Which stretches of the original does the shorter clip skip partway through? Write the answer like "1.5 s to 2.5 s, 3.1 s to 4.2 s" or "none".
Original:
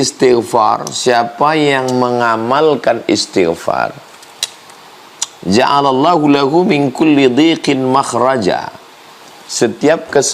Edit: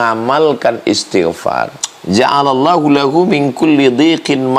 4.1 s to 5.2 s